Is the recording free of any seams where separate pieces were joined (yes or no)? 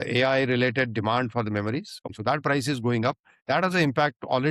no